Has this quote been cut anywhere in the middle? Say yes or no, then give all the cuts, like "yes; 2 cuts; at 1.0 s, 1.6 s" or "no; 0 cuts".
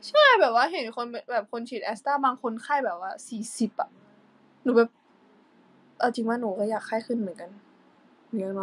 no; 0 cuts